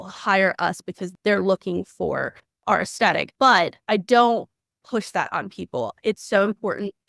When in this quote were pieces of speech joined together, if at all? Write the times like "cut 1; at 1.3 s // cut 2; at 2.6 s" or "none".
cut 1; at 1.0 s // cut 2; at 2.5 s // cut 3; at 3.8 s